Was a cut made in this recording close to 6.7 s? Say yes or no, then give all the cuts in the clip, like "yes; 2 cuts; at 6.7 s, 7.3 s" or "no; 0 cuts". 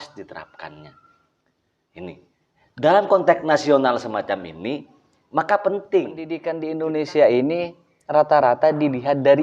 yes; 1 cut; at 6.7 s